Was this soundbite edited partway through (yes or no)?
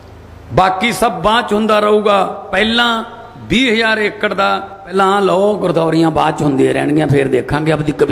yes